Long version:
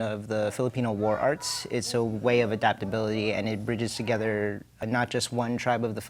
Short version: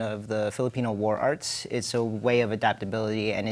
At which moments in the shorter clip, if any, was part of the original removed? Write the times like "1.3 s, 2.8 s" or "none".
none